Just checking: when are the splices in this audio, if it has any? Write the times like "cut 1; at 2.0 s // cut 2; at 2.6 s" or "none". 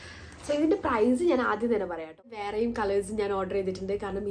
cut 1; at 2.4 s